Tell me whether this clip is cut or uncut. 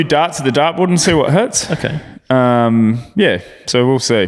uncut